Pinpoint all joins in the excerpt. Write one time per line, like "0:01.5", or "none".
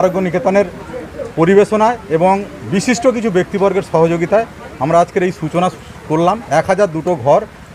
none